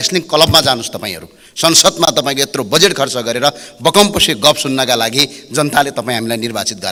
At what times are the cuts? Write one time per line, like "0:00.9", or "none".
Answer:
none